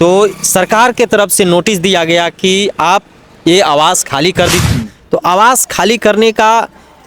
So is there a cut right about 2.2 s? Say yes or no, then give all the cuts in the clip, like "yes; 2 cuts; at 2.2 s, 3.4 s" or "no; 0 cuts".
no; 1 cut; at 4.6 s